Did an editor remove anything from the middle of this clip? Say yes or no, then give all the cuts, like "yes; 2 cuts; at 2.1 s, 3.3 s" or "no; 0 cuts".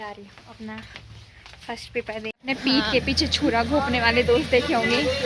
yes; 1 cut; at 2.3 s